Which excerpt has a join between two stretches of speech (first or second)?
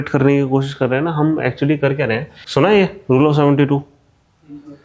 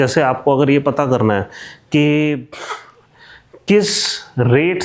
first